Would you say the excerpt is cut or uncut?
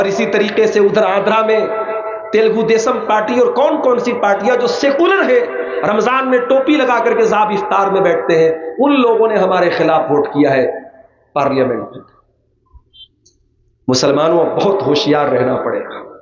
uncut